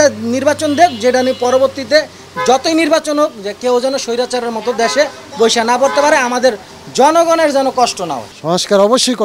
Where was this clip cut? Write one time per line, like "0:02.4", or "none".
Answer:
0:08.3